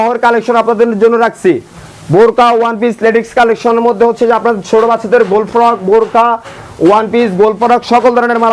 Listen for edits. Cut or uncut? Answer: uncut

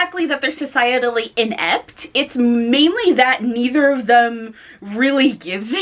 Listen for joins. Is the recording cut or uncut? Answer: uncut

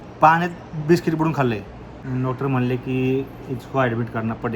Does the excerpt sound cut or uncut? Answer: cut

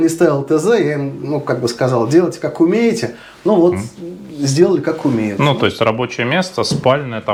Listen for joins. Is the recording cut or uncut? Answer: uncut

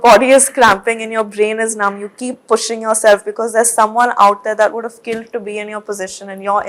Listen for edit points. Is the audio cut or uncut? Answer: uncut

